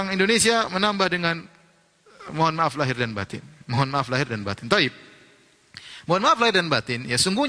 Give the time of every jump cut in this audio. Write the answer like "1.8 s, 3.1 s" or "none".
none